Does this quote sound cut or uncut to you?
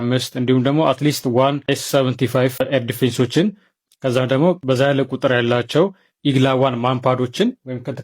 cut